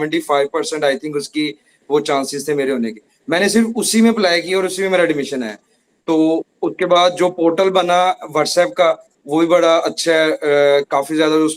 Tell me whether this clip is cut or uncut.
uncut